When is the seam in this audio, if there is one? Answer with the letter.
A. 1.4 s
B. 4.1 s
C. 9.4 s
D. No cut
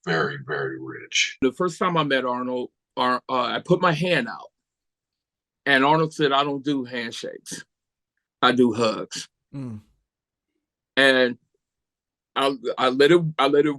A